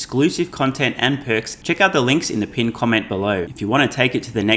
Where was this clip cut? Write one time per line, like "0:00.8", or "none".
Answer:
0:01.5
0:03.5